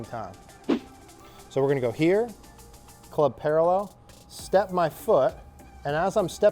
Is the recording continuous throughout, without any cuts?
no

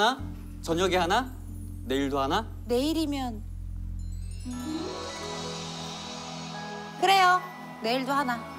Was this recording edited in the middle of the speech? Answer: no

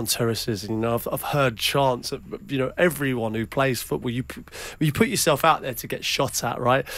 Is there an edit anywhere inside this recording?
no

